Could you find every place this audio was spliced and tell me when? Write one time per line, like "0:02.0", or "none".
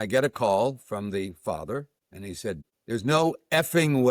0:02.5